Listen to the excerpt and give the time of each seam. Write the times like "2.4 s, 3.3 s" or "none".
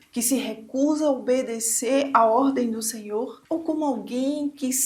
none